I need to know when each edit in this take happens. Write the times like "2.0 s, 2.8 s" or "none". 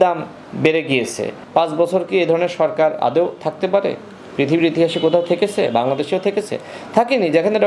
1.4 s